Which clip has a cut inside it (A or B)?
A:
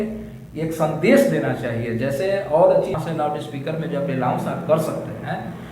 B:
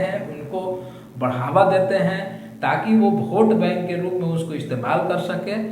A